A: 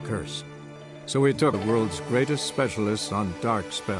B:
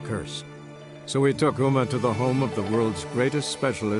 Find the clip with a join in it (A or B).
A